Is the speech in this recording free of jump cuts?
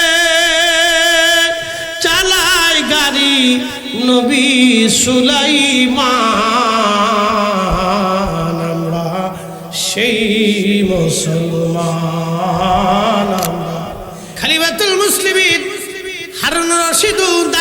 no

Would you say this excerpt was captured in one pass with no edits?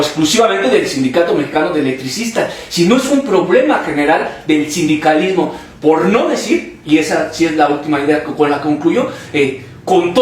yes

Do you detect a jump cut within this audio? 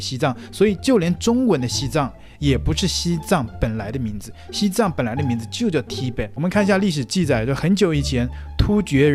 no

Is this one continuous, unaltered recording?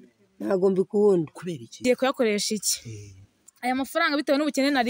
no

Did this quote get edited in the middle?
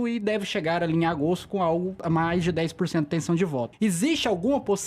yes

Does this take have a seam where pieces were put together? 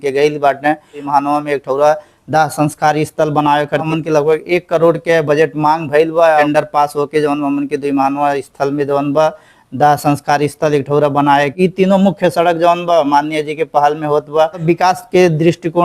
yes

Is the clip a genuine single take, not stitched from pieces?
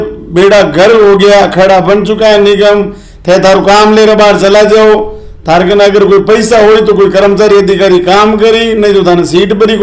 yes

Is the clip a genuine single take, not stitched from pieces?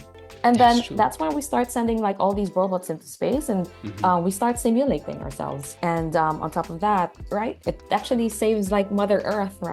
no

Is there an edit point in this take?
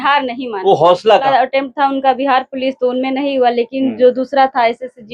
yes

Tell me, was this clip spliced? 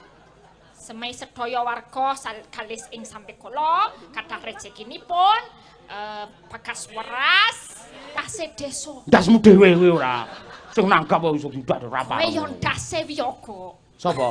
yes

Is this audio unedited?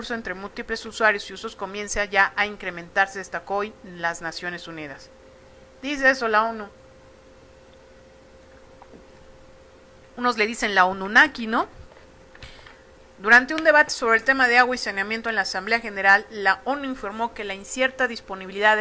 yes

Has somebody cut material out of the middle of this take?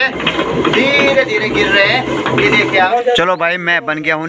yes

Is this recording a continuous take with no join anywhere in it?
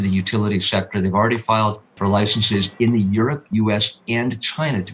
no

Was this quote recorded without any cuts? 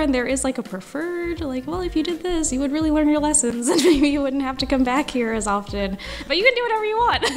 yes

